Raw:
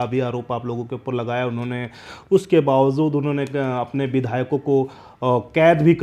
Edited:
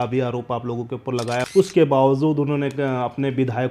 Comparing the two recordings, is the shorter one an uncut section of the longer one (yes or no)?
no